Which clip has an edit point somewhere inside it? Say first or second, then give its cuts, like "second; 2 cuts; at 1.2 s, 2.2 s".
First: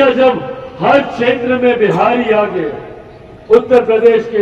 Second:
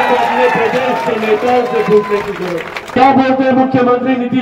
second; 1 cut; at 2.9 s